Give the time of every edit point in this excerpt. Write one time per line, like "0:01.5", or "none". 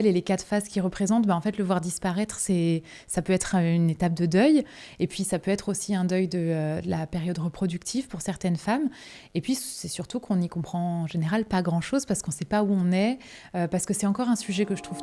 none